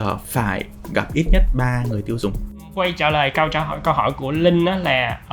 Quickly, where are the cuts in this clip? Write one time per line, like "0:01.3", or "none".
0:02.7